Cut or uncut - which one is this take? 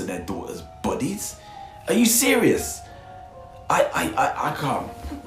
uncut